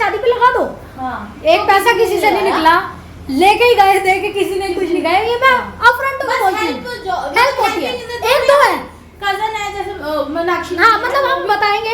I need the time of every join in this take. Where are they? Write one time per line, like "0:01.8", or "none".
none